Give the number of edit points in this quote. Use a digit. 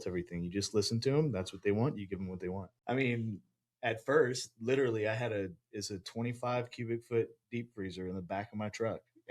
1